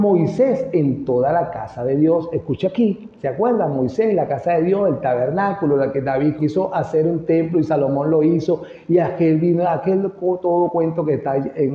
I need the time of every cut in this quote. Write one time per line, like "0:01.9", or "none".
0:06.4